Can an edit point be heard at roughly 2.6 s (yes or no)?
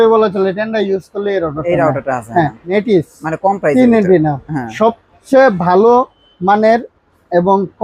yes